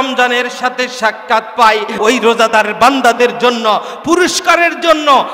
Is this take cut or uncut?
cut